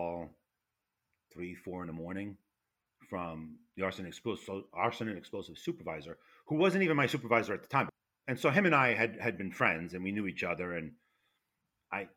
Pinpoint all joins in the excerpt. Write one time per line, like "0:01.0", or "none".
0:07.9